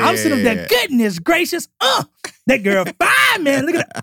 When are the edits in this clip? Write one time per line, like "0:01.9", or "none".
none